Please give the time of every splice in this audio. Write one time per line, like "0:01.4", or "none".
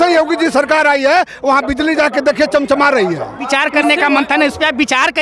0:03.4